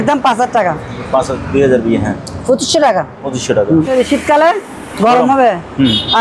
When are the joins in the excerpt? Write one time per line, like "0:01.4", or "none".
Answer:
0:01.3
0:03.9

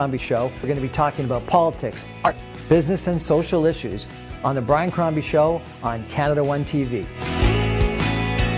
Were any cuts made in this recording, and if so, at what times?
0:02.2

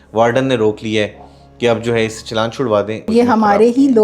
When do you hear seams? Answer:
0:03.1

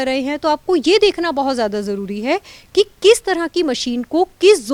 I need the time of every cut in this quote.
none

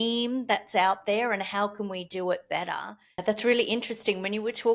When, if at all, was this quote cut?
0:03.2

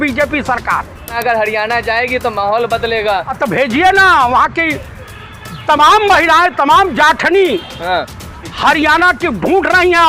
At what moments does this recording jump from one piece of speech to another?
0:01.2
0:03.3

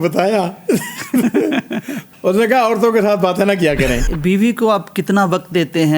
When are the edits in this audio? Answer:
0:02.0
0:04.0

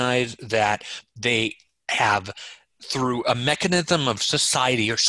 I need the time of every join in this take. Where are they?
none

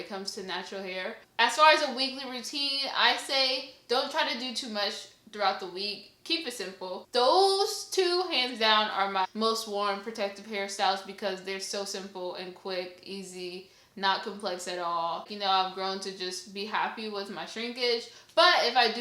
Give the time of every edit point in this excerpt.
0:01.2
0:07.0
0:15.3

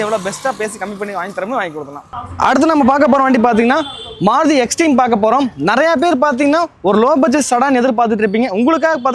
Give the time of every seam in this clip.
none

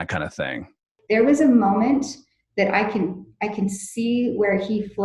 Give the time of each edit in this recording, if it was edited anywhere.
0:00.9

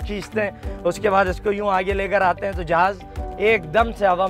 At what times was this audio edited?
none

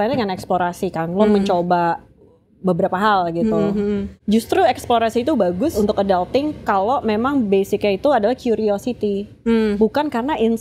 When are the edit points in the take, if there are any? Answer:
0:04.1
0:05.7

